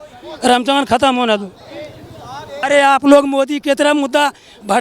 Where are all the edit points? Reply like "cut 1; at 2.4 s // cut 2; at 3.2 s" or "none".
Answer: cut 1; at 2.6 s